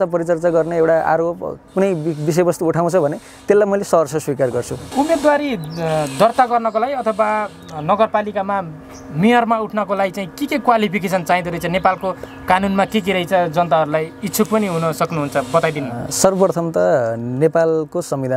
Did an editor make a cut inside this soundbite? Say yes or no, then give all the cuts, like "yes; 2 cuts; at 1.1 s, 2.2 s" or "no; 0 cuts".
no; 0 cuts